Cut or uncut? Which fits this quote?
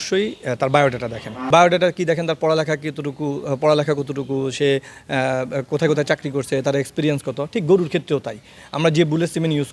cut